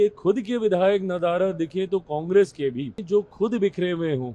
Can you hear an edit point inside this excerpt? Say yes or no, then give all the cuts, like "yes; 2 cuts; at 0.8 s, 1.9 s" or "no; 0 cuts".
yes; 1 cut; at 3.0 s